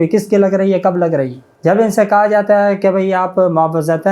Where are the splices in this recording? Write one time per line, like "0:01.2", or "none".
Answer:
0:01.4